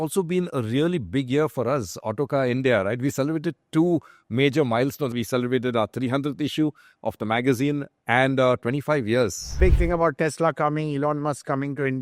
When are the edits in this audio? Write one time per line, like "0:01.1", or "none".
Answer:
0:05.1
0:09.6